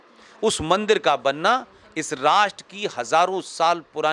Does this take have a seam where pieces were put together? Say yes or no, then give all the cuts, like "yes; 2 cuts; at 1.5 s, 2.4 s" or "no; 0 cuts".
no; 0 cuts